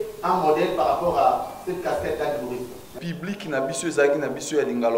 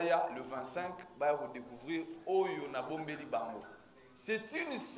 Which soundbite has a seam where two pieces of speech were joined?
first; 1 cut; at 3.0 s

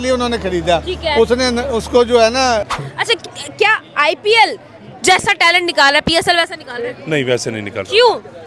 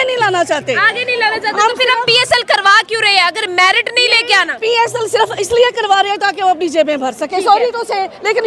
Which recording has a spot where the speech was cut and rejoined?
first; 1 cut; at 2.7 s

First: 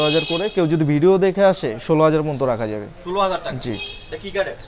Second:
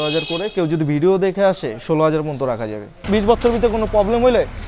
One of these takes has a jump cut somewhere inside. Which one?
second; 1 cut; at 3.0 s

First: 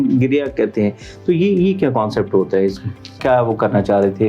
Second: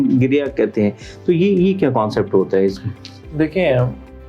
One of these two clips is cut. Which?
first; 1 cut; at 3.2 s

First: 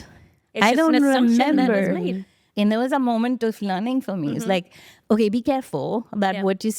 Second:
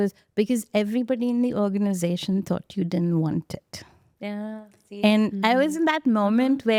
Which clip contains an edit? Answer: first; 1 cut; at 2.5 s

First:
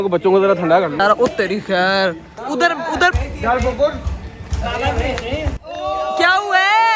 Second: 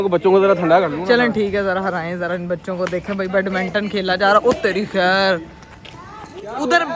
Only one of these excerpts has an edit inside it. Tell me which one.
first; 2 cuts; at 1.0 s, 2.3 s

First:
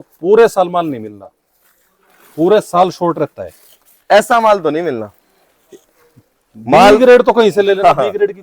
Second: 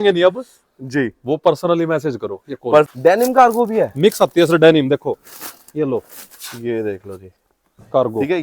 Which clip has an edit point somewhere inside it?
second; 1 cut; at 2.9 s

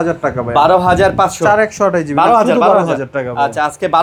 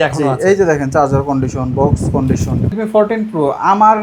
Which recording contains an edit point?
second; 1 cut; at 2.7 s

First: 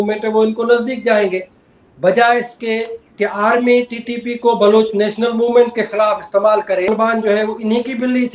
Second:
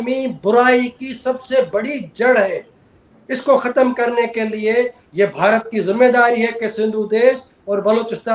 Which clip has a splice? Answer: first; 1 cut; at 6.9 s

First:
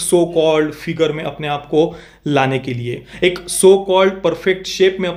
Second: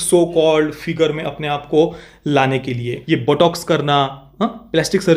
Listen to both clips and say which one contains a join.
second; 1 cut; at 2.9 s

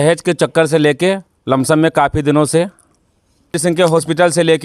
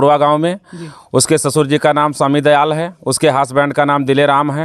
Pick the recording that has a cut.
first; 1 cut; at 3.5 s

